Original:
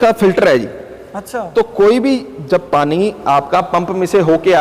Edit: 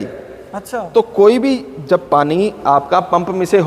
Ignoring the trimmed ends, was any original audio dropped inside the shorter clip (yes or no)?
no